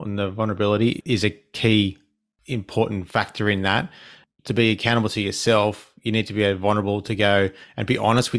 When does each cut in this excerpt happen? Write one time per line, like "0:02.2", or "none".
none